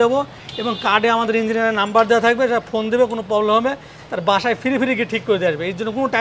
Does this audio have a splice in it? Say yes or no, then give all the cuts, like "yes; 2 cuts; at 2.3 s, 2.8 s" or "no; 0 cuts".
no; 0 cuts